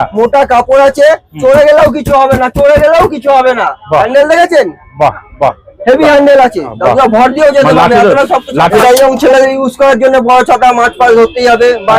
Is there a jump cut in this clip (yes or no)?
yes